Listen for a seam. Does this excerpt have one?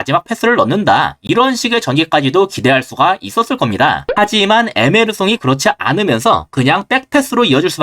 yes; 1 cut; at 4.1 s

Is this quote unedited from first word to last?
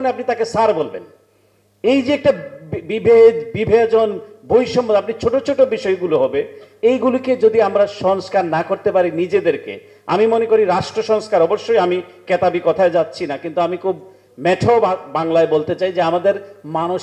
yes; 0 cuts

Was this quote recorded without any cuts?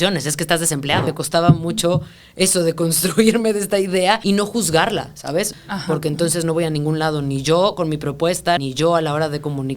no; 4 cuts; at 1.1 s, 4.2 s, 5.5 s, 8.6 s

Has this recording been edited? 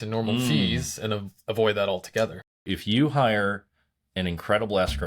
yes; 1 cut; at 2.6 s

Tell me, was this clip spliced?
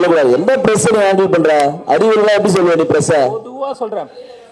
no; 0 cuts

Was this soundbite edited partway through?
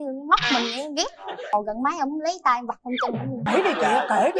yes; 2 cuts; at 1.5 s, 3.5 s

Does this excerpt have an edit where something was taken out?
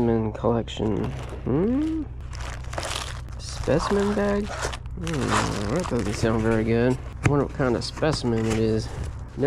no; 0 cuts

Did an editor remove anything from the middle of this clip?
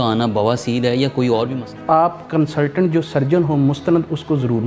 yes; 1 cut; at 1.7 s

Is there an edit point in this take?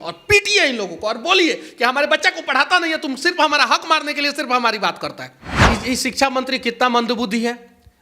yes; 1 cut; at 5.5 s

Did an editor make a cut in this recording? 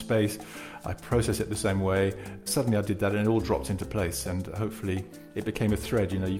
yes; 2 cuts; at 2.5 s, 5.2 s

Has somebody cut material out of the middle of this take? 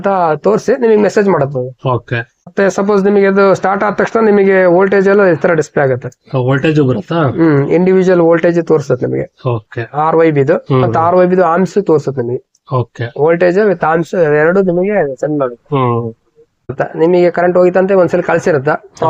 yes; 2 cuts; at 2.5 s, 16.7 s

